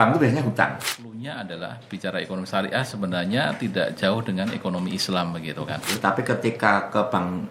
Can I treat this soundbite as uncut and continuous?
no; 2 cuts; at 0.9 s, 5.9 s

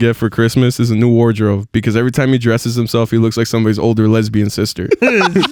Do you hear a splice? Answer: no; 0 cuts

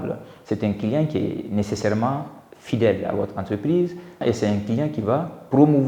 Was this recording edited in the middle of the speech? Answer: yes; 1 cut; at 4.2 s

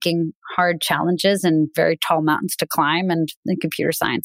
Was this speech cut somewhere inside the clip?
no; 0 cuts

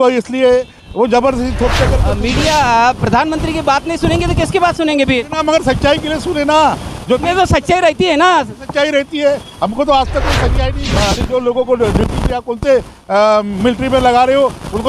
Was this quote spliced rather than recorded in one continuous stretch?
yes; 2 cuts; at 2.2 s, 10.7 s

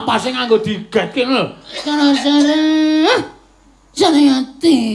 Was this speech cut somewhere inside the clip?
no; 0 cuts

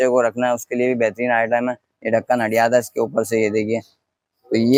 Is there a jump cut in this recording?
no; 0 cuts

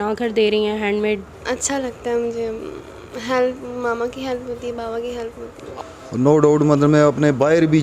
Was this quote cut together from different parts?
yes; 2 cuts; at 1.3 s, 5.6 s

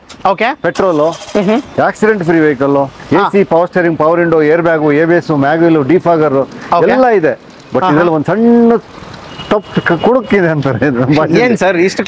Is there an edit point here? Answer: no; 0 cuts

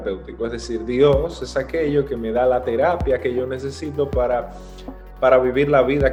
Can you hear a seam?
no; 0 cuts

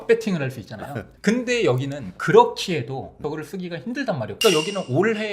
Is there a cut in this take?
yes; 2 cuts; at 3.2 s, 4.3 s

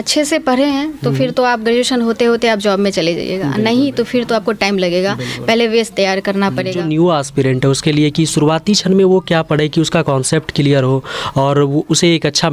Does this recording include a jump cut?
yes; 1 cut; at 6.8 s

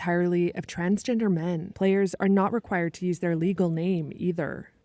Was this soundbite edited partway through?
yes; 1 cut; at 1.7 s

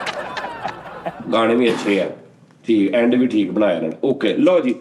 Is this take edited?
yes; 1 cut; at 1.0 s

